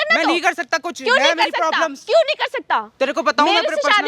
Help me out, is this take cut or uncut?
uncut